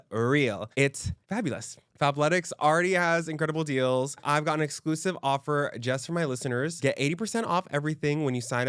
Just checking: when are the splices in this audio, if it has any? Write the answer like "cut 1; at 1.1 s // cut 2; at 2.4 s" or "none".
cut 1; at 1.9 s // cut 2; at 4.2 s // cut 3; at 6.7 s